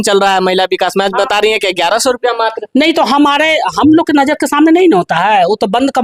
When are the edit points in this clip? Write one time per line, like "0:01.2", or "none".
none

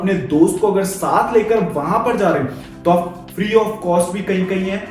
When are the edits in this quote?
0:03.2

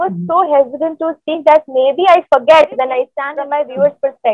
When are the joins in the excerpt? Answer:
0:03.1

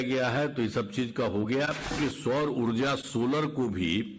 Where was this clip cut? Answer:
0:01.9

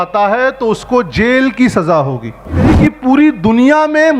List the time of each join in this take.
0:02.7

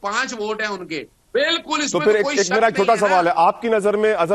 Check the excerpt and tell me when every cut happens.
0:01.2

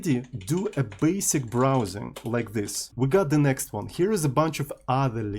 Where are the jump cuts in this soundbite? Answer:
0:02.9

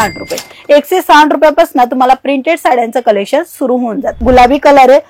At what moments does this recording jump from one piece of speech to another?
0:04.1

